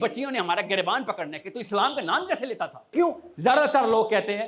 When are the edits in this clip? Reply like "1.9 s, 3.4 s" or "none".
2.9 s

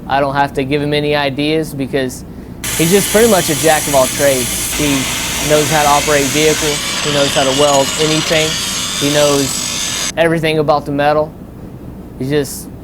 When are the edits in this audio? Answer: 10.1 s

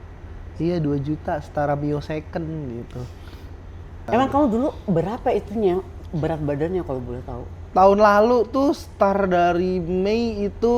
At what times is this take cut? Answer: 4.0 s

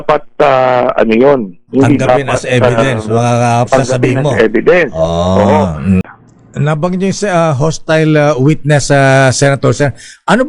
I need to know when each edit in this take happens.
6.1 s

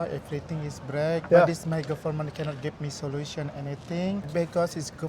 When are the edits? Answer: 1.2 s, 4.3 s

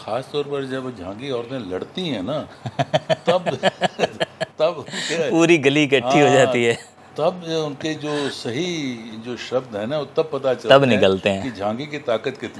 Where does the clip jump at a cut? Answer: none

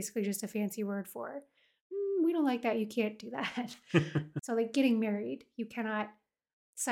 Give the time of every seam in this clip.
4.3 s

